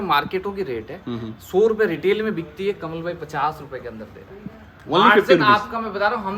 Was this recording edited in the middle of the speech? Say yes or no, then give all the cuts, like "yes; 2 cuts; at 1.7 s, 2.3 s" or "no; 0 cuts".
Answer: no; 0 cuts